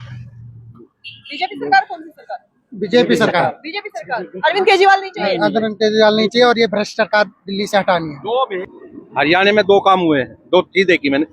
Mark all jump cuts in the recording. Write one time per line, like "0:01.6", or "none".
0:08.7